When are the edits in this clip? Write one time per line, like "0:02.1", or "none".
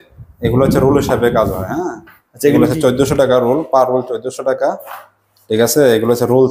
none